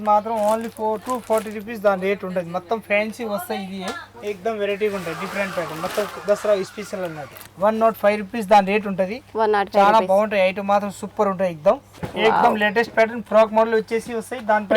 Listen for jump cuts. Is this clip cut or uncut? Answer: cut